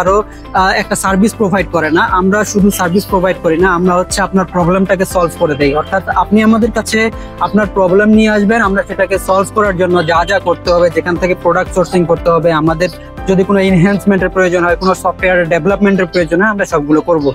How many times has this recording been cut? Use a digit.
0